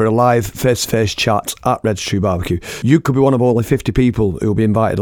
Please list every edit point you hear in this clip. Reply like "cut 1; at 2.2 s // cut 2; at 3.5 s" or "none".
cut 1; at 2.7 s